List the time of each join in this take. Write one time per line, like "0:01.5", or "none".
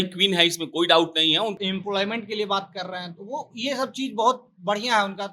0:01.6